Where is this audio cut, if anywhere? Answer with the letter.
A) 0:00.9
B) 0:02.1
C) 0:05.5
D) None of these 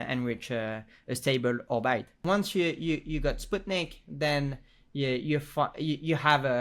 B